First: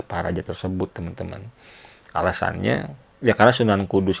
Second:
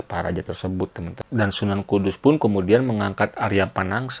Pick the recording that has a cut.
second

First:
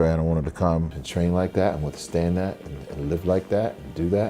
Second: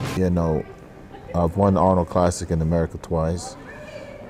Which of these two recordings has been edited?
first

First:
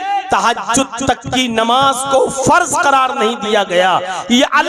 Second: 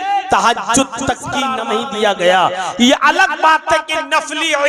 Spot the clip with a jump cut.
second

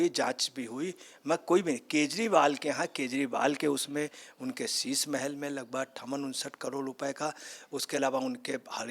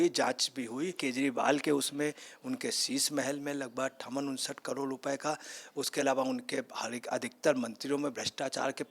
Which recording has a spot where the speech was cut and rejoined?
second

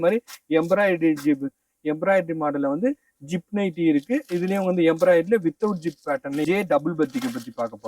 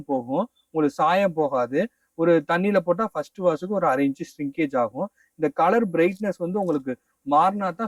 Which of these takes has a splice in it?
first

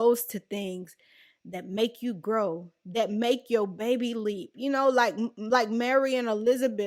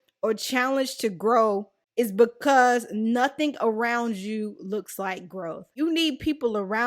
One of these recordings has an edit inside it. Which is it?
second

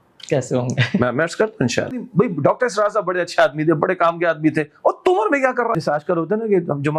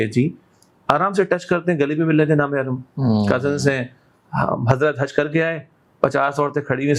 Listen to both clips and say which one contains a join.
first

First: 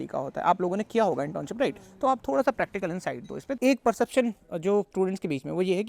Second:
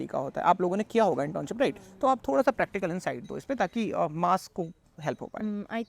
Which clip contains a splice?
first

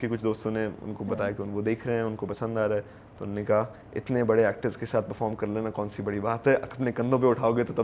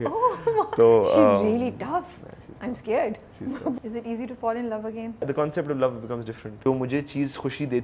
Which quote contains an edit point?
second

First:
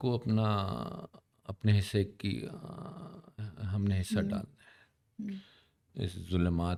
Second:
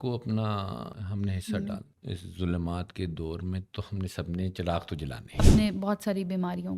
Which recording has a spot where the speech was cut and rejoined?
second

